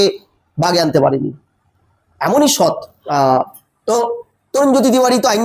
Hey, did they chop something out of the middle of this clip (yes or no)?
yes